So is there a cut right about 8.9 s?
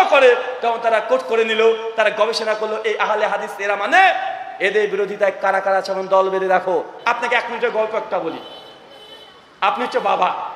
no; 1 cut; at 6.9 s

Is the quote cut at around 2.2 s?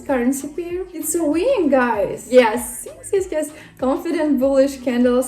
yes; 2 cuts; at 0.9 s, 2.2 s

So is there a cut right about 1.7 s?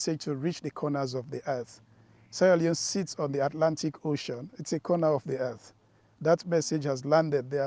no; 0 cuts

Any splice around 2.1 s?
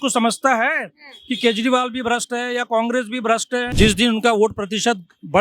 no; 1 cut; at 3.6 s

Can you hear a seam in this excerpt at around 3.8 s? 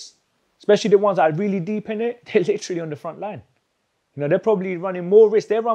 no; 1 cut; at 2.2 s

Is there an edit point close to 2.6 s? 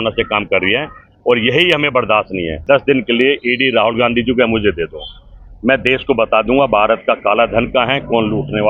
yes; 1 cut; at 2.6 s

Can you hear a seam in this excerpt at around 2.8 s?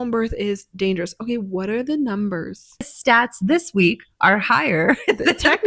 yes; 1 cut; at 2.8 s

